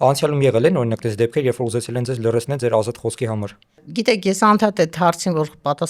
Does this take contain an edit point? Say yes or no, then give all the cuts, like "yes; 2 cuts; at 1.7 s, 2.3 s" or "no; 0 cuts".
no; 0 cuts